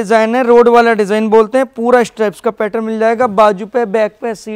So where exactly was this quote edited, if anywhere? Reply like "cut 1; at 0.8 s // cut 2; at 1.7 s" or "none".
none

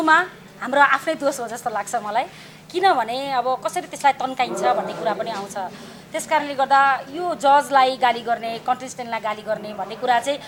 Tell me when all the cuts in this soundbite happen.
none

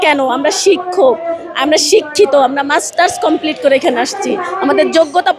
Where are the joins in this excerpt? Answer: none

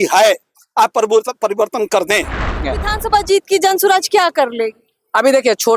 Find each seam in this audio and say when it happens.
cut 1; at 2.6 s

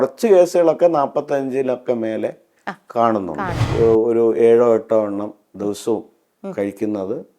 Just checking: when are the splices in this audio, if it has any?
cut 1; at 3.7 s

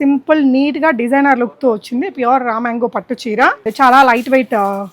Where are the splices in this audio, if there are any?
cut 1; at 3.7 s

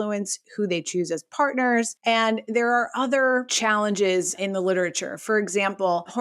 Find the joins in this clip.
cut 1; at 1.9 s // cut 2; at 3.5 s // cut 3; at 4.3 s

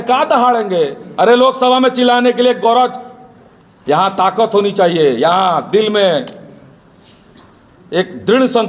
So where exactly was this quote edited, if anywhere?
none

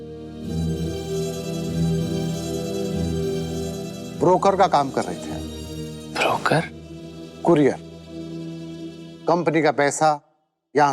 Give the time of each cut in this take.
cut 1; at 5.3 s

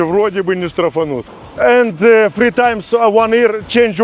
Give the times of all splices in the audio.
cut 1; at 1.3 s

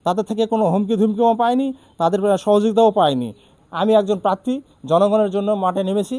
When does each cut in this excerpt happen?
cut 1; at 3.5 s

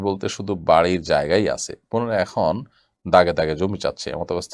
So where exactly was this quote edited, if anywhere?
none

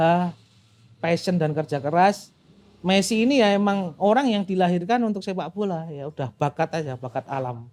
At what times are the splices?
none

